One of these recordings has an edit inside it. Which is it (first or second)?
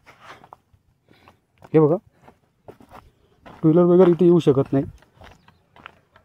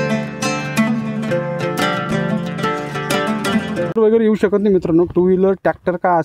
second